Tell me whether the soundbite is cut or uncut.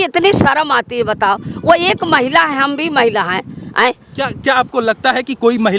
uncut